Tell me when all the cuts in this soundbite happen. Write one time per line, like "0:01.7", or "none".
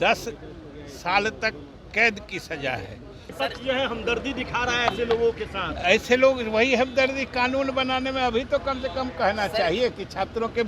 0:03.2